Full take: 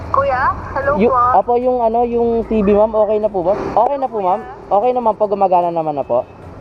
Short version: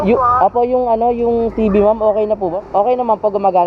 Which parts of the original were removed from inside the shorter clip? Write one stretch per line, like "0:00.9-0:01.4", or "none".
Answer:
0:03.5-0:04.6